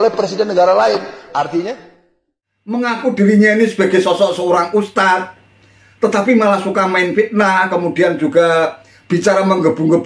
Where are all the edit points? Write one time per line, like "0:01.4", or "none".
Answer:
0:02.8